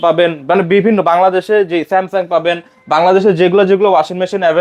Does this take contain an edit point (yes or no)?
no